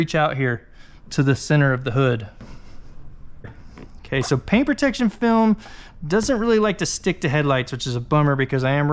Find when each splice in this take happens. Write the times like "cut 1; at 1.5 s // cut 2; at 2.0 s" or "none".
cut 1; at 3.6 s